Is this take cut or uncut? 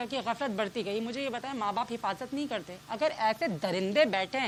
uncut